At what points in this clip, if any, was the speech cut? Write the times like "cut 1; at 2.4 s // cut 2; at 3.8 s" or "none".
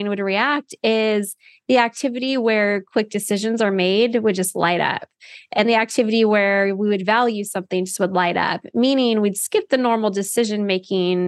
none